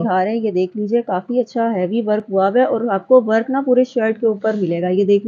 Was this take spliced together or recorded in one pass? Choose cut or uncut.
uncut